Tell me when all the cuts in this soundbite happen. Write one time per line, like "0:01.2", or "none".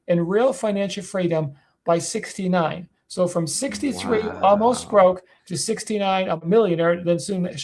0:06.4